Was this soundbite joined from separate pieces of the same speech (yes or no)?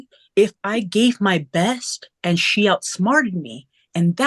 no